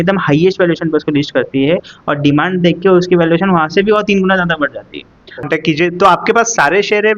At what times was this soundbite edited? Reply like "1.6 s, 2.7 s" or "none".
5.5 s